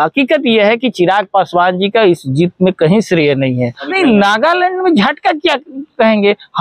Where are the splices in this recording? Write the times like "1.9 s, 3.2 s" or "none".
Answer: 3.9 s